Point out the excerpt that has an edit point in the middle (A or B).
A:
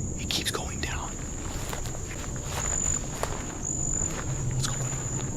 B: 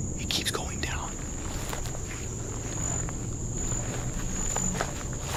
A